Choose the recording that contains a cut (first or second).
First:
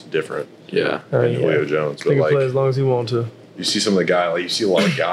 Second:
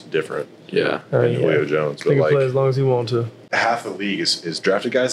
second